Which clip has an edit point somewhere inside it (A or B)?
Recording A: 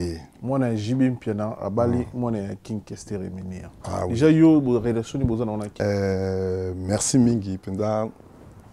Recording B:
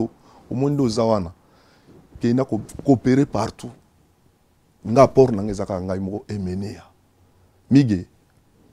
A